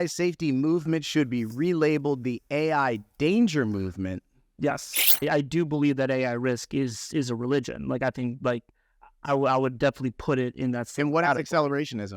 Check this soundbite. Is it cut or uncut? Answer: cut